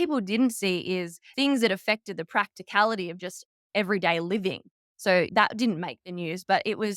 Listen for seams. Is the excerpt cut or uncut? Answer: cut